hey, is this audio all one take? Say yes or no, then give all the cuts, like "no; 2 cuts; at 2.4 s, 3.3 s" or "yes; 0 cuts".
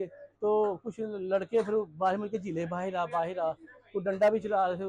yes; 0 cuts